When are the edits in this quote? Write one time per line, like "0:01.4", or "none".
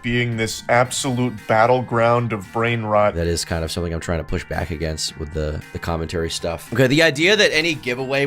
0:03.2
0:06.7